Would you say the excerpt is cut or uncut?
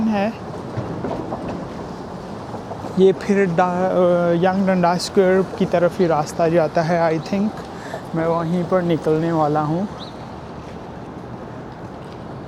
uncut